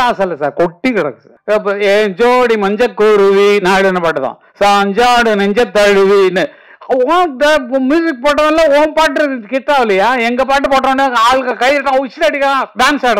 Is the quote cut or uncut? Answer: cut